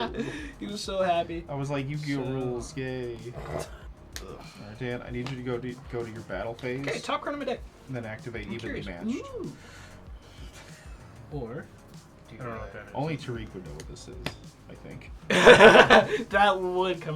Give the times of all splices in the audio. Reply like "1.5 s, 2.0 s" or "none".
none